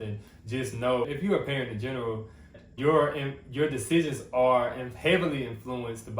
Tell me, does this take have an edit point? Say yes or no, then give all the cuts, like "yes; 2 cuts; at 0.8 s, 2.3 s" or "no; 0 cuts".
yes; 2 cuts; at 1.1 s, 2.5 s